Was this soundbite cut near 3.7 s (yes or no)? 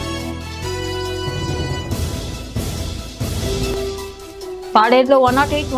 yes